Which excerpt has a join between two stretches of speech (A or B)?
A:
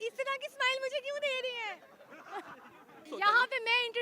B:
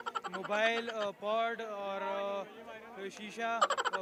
A